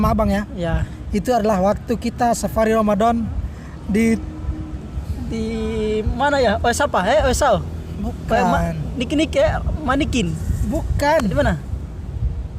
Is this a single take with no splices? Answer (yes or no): yes